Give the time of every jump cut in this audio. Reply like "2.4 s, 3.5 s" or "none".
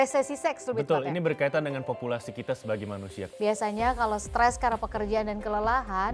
3.2 s